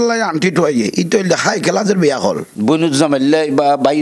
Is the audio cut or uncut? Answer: cut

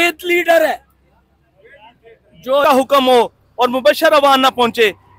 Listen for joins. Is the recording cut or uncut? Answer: cut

